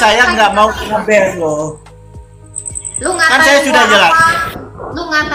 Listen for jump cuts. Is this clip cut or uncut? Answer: uncut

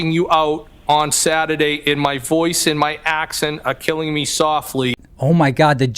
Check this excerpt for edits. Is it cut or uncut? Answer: cut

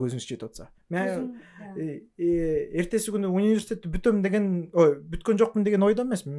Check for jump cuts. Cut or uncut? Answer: uncut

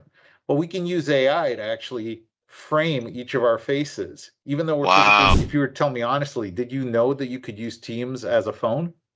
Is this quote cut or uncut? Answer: cut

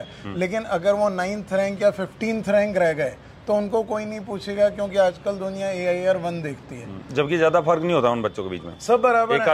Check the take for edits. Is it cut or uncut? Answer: uncut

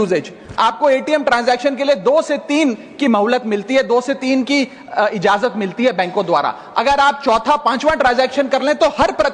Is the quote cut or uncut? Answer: uncut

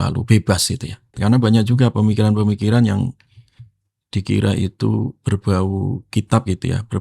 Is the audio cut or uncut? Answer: cut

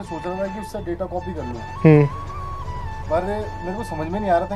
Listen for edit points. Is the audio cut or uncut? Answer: uncut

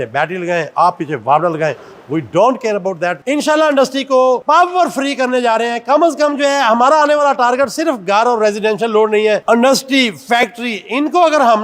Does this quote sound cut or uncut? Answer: cut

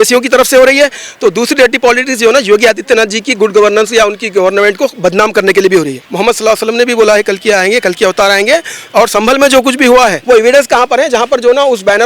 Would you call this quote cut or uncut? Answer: cut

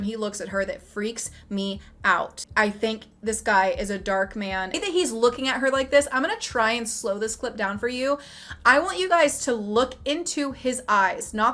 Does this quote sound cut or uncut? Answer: cut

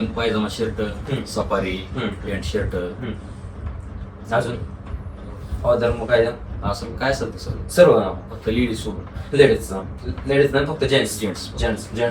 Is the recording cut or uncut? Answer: uncut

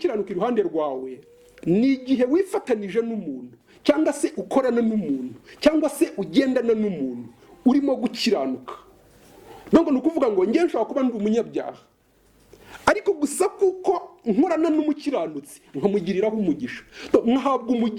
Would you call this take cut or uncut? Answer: uncut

